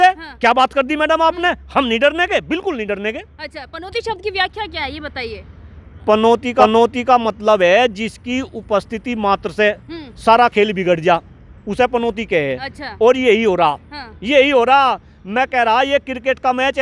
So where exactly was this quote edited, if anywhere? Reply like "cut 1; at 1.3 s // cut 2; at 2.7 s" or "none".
none